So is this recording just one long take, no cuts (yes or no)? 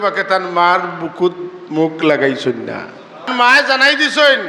no